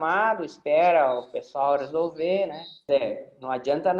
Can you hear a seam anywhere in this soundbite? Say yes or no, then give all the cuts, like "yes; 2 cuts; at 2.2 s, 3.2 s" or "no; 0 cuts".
yes; 1 cut; at 2.9 s